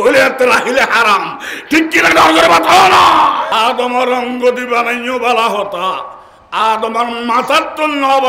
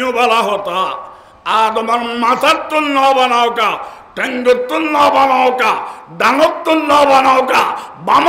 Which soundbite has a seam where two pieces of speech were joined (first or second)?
first